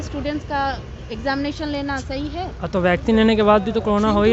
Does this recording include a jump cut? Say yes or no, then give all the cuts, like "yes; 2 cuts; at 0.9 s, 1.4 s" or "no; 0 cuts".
no; 0 cuts